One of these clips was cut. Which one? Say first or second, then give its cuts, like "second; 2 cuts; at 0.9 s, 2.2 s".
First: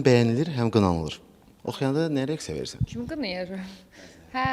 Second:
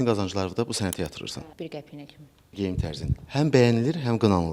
second; 2 cuts; at 1.5 s, 2.5 s